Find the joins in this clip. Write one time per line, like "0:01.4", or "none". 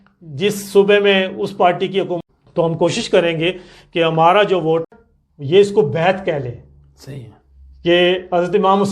0:02.2
0:04.9